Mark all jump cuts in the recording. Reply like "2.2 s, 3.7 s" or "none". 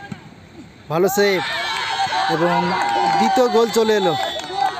none